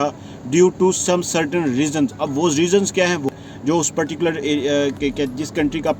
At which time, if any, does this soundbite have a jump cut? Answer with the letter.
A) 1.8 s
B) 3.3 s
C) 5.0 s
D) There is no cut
B